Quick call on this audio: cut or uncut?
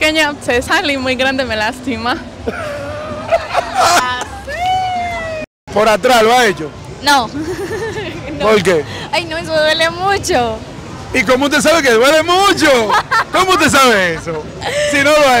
cut